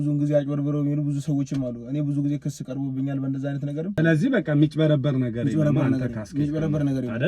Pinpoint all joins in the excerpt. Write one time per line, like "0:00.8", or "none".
0:04.0